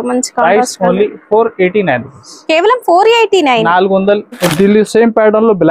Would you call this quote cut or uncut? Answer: cut